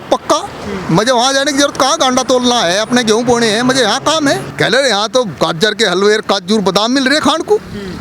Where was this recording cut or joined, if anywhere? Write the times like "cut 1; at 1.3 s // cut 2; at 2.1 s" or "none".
cut 1; at 4.5 s